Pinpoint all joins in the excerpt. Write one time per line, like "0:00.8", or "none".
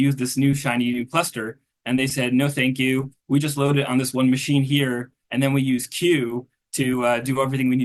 none

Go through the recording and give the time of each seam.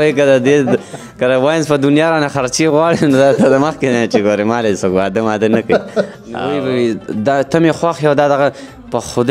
0:06.5

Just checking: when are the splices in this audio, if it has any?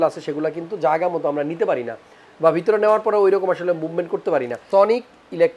0:04.6

